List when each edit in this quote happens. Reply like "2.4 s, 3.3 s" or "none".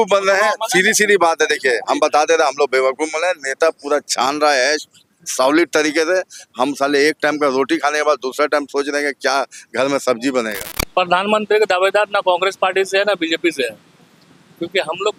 none